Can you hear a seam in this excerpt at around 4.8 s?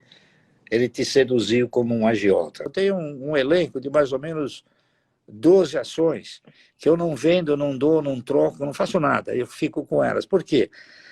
no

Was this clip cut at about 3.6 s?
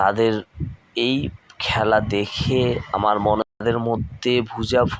yes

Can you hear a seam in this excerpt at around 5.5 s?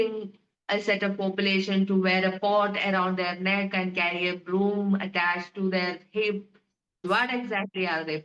no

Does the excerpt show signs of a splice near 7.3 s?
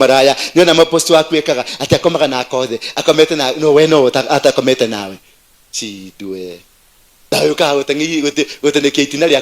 yes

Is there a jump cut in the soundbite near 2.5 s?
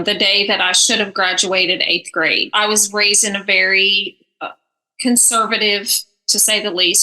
yes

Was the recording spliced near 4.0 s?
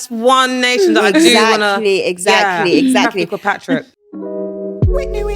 yes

